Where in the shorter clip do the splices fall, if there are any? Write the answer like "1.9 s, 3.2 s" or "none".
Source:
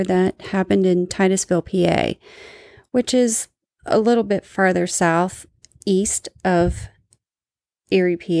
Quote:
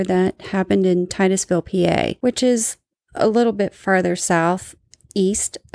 2.2 s